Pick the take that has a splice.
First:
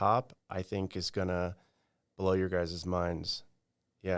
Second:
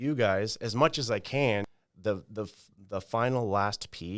second; 1 cut; at 1.7 s

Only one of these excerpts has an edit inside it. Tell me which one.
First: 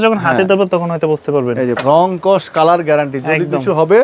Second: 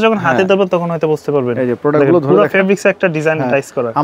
first; 1 cut; at 1.8 s

